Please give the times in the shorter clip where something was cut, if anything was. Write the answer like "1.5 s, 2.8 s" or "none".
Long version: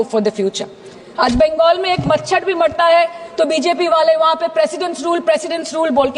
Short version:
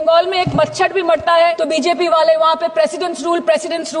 1.6 s